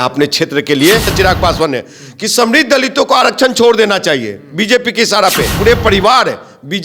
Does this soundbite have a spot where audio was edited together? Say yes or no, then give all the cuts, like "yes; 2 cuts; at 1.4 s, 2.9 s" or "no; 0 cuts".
yes; 2 cuts; at 1.1 s, 5.6 s